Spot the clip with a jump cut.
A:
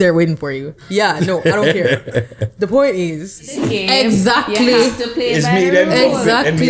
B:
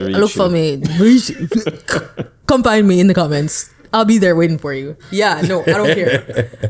A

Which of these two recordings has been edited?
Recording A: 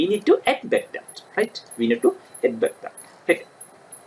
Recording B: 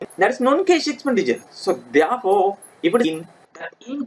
B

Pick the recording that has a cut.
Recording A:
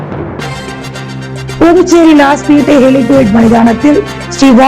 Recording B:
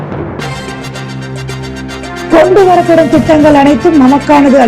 A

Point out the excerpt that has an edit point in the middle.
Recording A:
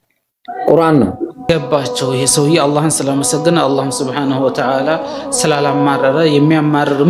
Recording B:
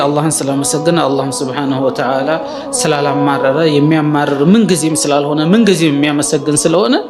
A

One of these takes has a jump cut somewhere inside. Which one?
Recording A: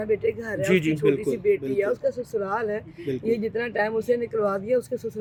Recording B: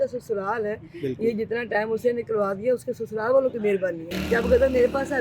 B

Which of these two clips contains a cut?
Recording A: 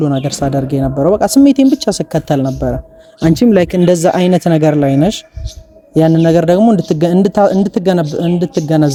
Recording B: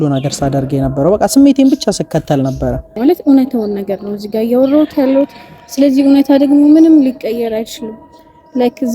B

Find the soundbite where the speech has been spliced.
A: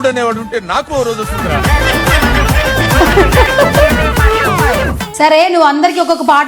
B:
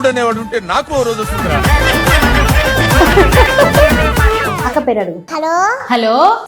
A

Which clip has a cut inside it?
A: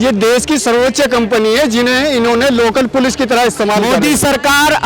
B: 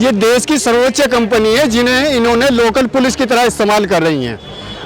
A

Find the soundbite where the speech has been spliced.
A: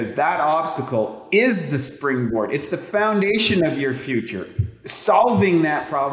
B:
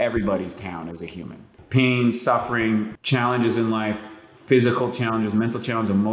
B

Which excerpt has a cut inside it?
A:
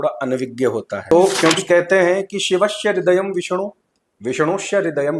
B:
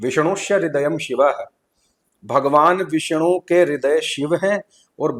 A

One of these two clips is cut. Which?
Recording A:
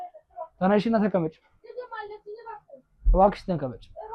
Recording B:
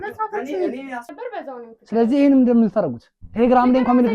B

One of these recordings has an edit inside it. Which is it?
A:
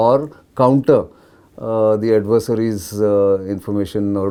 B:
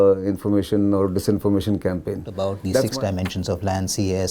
B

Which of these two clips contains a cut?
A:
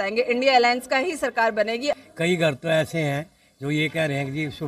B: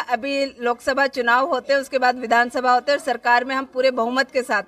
A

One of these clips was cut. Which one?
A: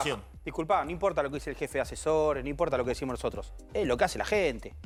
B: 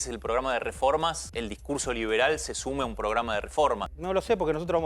B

